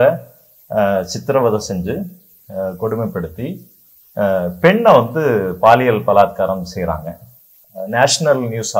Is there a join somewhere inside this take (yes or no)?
yes